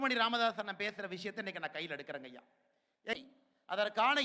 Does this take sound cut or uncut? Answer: cut